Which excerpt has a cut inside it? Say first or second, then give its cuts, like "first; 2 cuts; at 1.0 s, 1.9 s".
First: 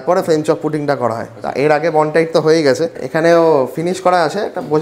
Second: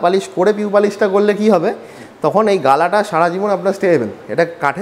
first; 1 cut; at 3.0 s